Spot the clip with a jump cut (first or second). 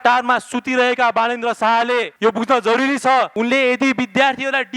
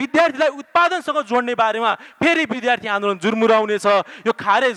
first